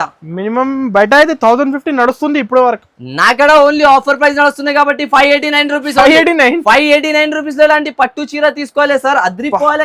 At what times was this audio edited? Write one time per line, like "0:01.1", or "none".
none